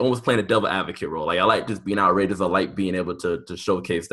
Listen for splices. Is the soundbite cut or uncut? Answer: uncut